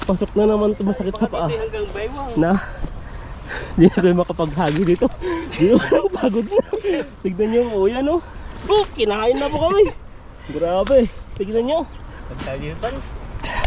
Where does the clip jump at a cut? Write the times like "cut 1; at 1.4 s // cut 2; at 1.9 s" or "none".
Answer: none

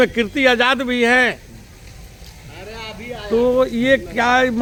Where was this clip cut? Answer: none

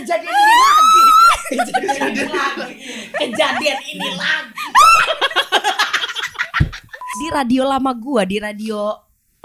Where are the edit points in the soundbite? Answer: cut 1; at 7.1 s

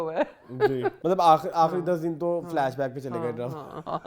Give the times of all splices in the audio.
cut 1; at 1.0 s

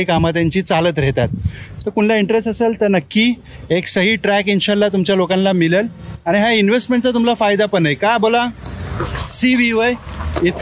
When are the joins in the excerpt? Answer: none

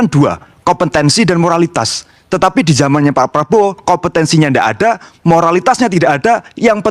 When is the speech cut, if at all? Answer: none

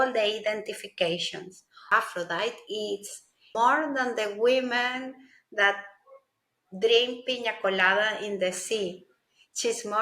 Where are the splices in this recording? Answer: cut 1; at 1.9 s // cut 2; at 3.5 s

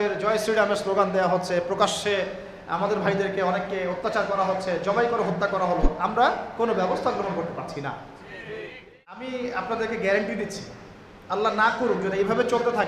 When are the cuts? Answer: cut 1; at 9.2 s

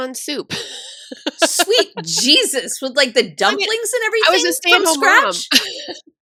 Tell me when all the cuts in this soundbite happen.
none

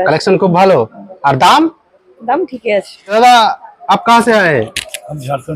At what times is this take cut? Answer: cut 1; at 3.1 s

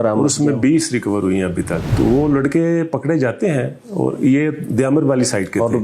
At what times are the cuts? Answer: cut 1; at 1.8 s

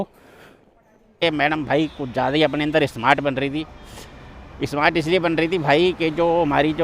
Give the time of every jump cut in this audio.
cut 1; at 1.2 s

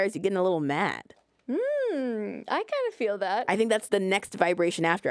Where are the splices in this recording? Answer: none

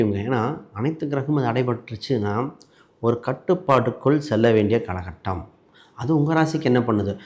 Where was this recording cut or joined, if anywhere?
none

